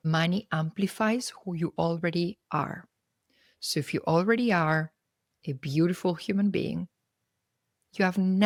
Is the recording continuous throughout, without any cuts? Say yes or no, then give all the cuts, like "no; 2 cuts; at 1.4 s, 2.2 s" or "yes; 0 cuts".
yes; 0 cuts